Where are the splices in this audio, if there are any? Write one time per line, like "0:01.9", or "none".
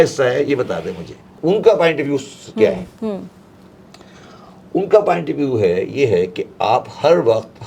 none